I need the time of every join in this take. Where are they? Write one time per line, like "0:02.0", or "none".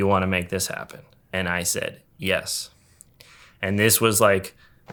none